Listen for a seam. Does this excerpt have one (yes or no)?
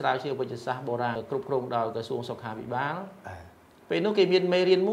yes